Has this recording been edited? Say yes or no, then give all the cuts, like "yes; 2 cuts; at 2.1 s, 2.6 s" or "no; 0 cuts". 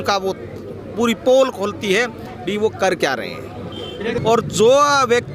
yes; 1 cut; at 4.2 s